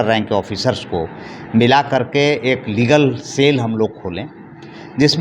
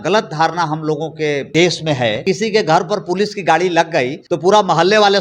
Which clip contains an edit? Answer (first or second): second